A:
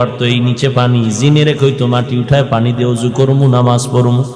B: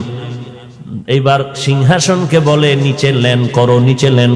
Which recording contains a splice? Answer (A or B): B